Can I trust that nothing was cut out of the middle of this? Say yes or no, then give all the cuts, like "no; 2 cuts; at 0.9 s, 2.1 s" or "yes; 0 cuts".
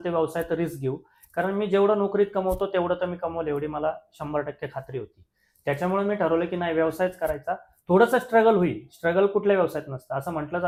yes; 0 cuts